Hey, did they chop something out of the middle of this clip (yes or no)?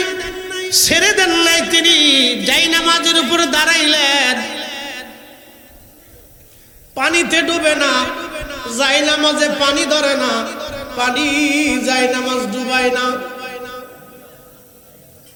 no